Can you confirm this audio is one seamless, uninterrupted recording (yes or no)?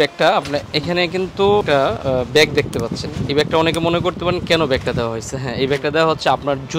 no